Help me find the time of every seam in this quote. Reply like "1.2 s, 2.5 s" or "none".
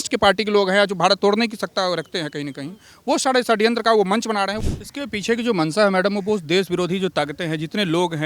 4.6 s